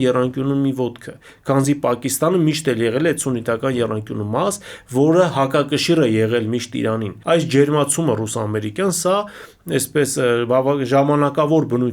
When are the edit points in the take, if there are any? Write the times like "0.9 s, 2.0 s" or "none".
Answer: 7.1 s